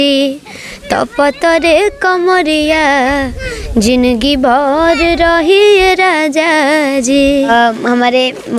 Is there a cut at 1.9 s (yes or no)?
no